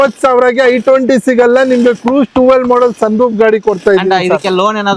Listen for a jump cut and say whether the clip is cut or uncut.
uncut